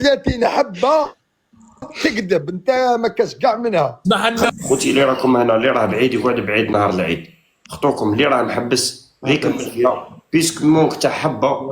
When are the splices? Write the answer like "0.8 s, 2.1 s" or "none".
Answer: 4.5 s